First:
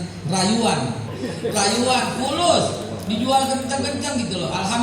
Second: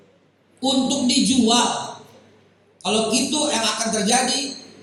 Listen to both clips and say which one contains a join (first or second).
first